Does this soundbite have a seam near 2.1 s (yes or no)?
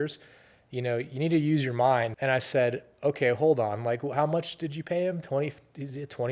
yes